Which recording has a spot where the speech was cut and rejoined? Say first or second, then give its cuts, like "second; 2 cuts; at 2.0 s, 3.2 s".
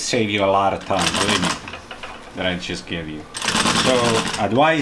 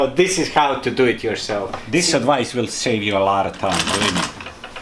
second; 1 cut; at 1.8 s